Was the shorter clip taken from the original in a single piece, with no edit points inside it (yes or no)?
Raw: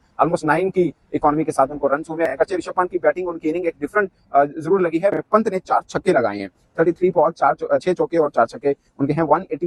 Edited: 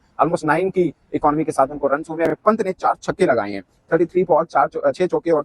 no